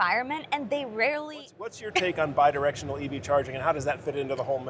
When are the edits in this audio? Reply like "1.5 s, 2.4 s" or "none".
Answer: 1.8 s